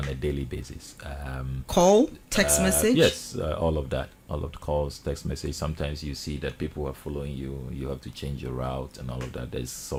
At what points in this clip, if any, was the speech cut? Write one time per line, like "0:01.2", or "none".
none

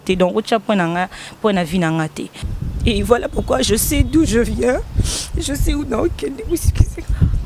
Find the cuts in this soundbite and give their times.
0:02.4

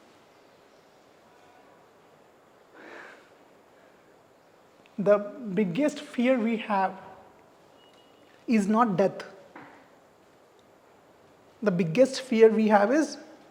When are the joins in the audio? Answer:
none

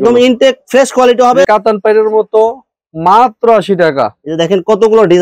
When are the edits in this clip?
0:01.5

